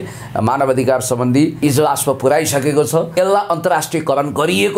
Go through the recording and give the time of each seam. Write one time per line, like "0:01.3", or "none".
0:01.6
0:03.1